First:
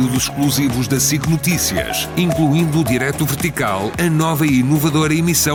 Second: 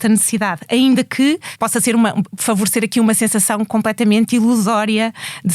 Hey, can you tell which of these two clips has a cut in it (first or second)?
second